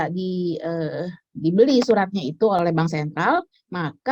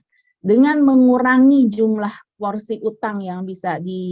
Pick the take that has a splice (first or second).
first